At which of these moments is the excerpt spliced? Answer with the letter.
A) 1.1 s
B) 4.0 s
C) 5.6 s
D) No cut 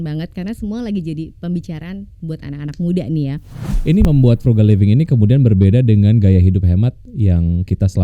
B